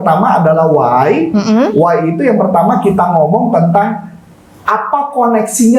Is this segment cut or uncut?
uncut